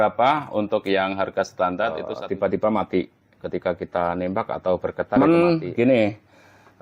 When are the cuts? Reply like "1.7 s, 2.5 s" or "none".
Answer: 2.1 s, 5.2 s